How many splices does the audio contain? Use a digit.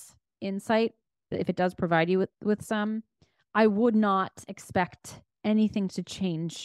0